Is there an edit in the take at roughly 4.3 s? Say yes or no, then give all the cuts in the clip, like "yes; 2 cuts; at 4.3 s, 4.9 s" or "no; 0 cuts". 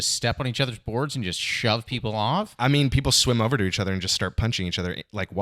no; 1 cut; at 2.5 s